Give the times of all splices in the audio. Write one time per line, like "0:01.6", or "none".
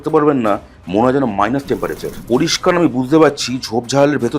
0:02.1